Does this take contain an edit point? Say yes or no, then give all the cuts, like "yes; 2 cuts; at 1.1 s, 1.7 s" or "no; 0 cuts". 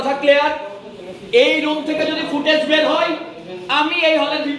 no; 0 cuts